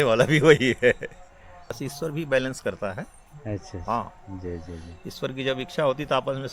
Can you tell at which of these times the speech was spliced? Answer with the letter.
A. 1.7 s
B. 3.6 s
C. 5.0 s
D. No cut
A